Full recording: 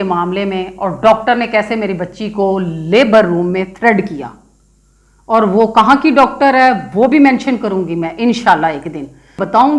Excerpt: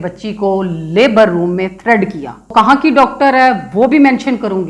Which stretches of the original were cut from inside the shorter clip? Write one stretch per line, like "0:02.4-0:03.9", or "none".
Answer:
0:04.5-0:05.7